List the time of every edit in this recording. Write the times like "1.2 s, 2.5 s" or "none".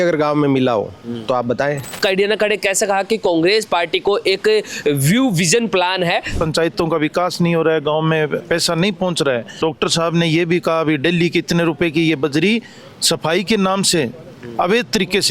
2.0 s, 6.4 s, 9.6 s